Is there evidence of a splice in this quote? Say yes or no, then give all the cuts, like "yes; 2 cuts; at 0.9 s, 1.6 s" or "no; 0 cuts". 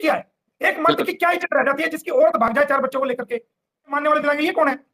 yes; 1 cut; at 4.0 s